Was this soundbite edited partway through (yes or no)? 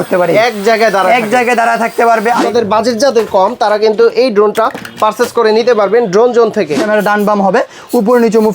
yes